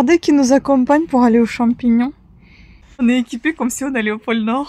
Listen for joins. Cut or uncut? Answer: cut